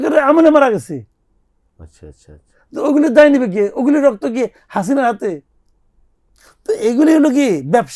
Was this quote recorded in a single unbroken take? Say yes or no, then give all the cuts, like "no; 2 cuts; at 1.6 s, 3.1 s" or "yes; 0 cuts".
yes; 0 cuts